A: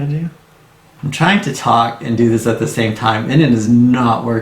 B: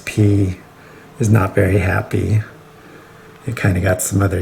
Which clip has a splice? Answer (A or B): A